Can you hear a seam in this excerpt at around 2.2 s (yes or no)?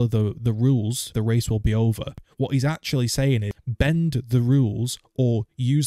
yes